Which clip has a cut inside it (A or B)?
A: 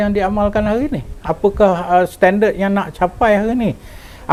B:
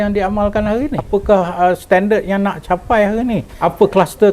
B